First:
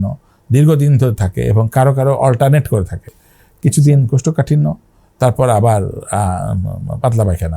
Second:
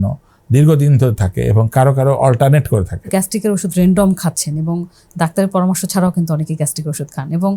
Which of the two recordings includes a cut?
second; 1 cut; at 3.1 s

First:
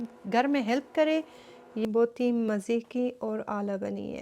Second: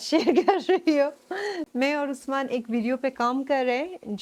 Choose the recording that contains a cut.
first; 1 cut; at 1.8 s

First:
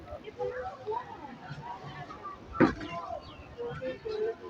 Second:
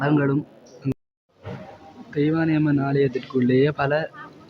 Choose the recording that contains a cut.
second; 1 cut; at 0.9 s

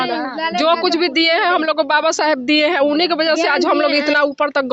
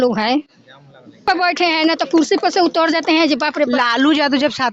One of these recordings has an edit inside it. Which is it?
second; 1 cut; at 1.3 s

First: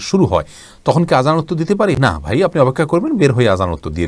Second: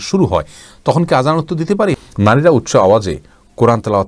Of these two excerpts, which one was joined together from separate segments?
second; 1 cut; at 1.8 s

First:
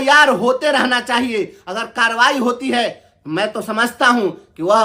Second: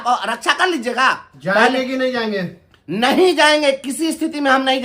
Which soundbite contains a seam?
second; 1 cut; at 1.3 s

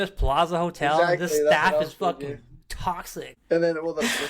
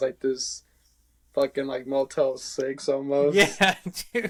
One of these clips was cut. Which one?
first; 1 cut; at 3.3 s

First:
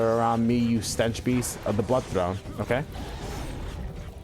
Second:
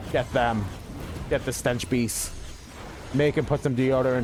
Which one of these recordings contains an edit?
first; 1 cut; at 2.9 s

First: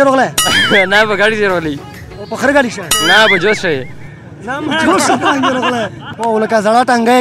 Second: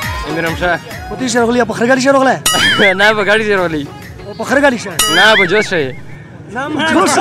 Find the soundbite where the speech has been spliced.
first; 1 cut; at 6.0 s

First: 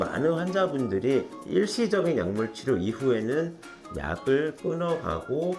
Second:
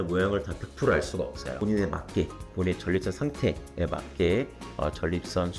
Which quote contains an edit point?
second; 1 cut; at 1.5 s

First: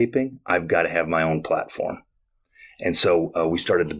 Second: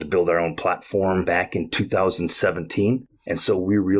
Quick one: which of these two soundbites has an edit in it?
second; 2 cuts; at 1.2 s, 3.1 s

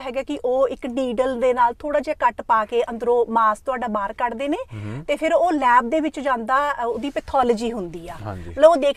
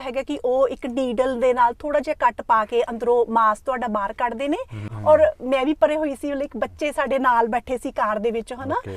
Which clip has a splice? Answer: second; 1 cut; at 4.9 s

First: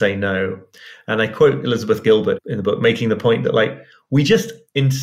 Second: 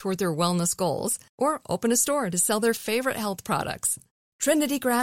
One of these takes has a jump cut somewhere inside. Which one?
first; 1 cut; at 2.4 s

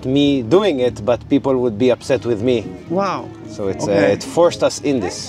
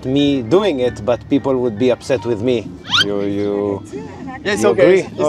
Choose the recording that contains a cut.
second; 1 cut; at 2.8 s

